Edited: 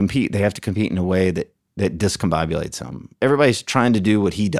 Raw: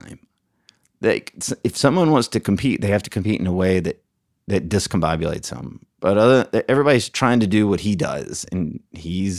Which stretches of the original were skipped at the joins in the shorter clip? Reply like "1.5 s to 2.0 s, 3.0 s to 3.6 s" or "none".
4.1 s to 4.3 s, 5.9 s to 6.6 s